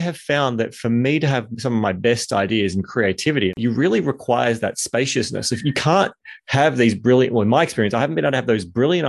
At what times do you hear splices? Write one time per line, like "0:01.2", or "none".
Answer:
0:03.6